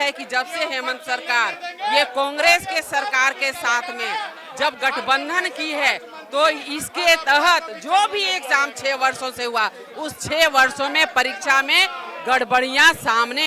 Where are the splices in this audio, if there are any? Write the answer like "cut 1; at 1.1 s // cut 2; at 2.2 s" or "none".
none